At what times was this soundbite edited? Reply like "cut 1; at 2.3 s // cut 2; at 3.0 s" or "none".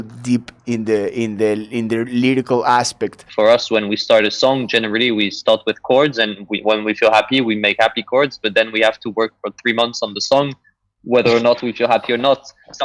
cut 1; at 3.2 s